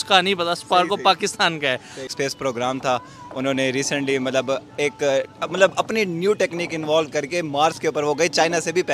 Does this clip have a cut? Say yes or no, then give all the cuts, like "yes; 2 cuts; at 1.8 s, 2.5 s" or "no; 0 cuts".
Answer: yes; 1 cut; at 2.1 s